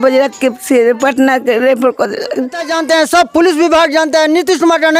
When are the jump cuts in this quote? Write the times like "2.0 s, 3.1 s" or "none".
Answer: 2.7 s